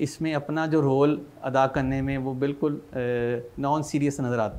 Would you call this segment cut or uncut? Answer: uncut